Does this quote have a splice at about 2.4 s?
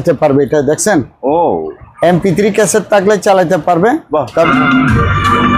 no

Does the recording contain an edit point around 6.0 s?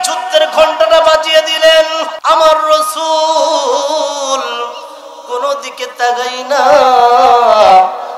no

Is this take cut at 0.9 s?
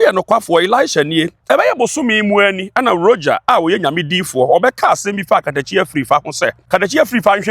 no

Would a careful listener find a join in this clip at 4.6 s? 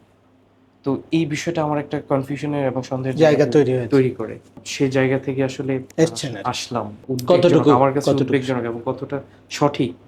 yes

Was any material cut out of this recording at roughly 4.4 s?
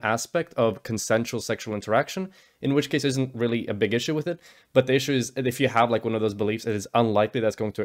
no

